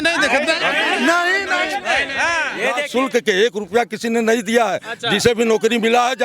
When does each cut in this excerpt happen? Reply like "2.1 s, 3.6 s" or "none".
2.8 s